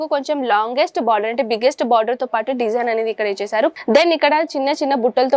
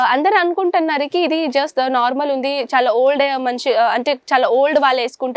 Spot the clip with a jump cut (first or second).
first